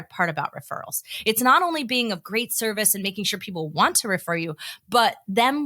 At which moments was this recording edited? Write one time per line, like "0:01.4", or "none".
none

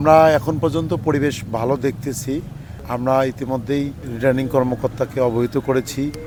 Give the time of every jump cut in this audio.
none

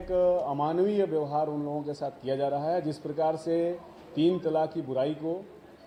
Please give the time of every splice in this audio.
none

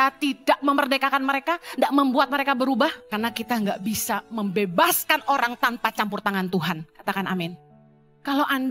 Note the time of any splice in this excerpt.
0:03.0

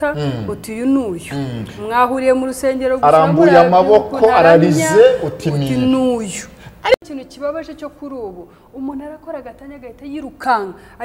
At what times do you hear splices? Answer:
0:07.0

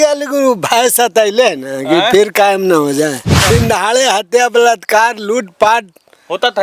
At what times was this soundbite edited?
0:03.3

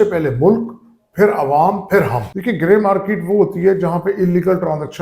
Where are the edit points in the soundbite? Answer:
0:02.3

